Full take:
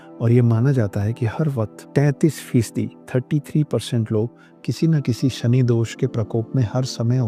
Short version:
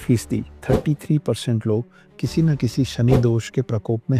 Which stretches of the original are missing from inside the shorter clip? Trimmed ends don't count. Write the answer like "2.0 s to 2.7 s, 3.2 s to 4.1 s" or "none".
none